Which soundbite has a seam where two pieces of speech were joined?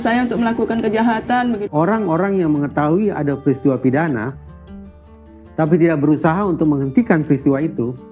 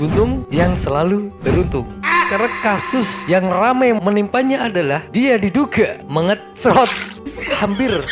first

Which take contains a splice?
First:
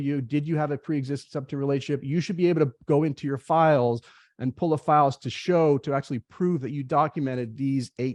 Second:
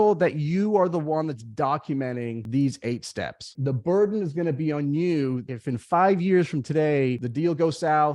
second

